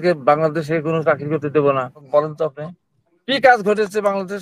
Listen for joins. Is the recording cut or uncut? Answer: cut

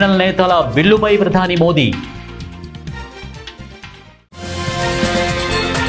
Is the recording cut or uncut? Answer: cut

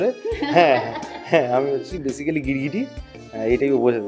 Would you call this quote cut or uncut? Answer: uncut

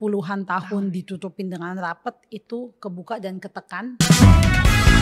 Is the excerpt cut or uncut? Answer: cut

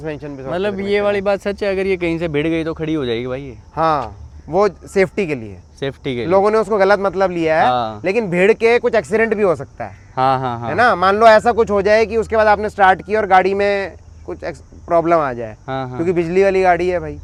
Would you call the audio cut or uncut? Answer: uncut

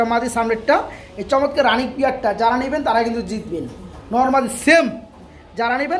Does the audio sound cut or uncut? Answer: uncut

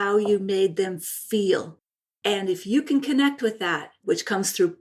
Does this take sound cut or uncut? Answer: cut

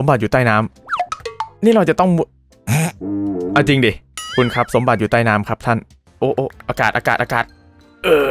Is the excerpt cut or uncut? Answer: cut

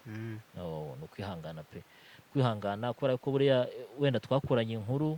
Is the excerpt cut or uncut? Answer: uncut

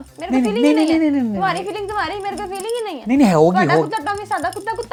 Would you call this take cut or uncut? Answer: uncut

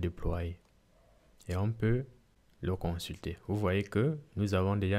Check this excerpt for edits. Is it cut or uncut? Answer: uncut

